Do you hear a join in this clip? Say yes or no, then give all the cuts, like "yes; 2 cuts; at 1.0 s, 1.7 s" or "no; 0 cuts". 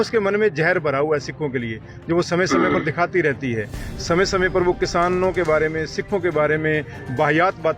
no; 0 cuts